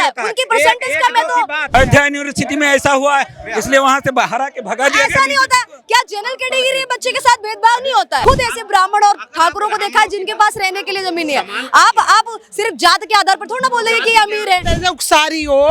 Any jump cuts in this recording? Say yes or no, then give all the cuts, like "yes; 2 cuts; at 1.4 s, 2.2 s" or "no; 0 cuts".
yes; 3 cuts; at 1.7 s, 8.2 s, 14.7 s